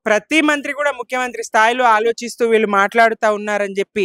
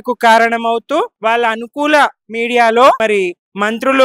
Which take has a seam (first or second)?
second